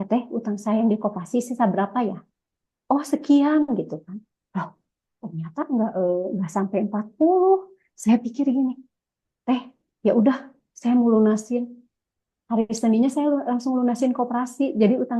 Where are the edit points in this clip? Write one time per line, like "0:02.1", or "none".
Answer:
none

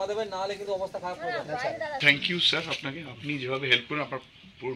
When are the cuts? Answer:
0:02.0

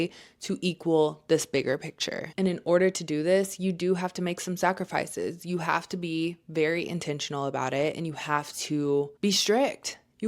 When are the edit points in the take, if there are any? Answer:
0:09.1

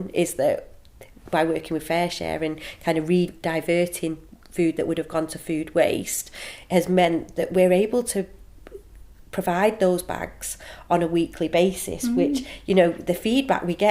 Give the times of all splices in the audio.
0:03.3

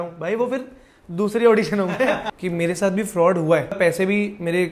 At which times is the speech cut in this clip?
0:02.3
0:03.8

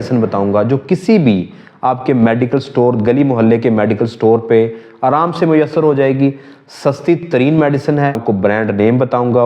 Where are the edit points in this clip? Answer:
0:08.2

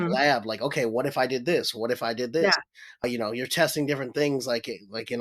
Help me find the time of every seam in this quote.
0:03.0

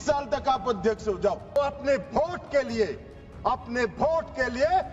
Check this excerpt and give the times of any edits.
0:01.6

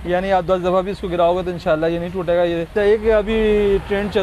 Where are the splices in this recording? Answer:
0:02.7

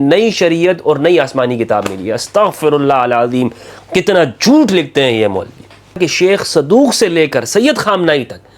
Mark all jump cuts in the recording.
0:06.0

